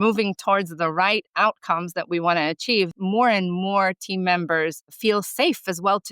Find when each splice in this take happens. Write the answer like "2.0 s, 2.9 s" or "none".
2.9 s, 4.9 s